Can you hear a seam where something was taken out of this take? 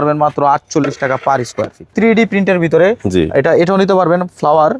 yes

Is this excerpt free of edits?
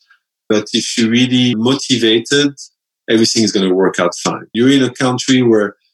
no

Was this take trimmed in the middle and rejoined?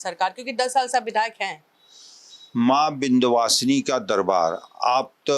no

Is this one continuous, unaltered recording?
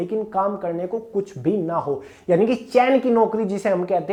yes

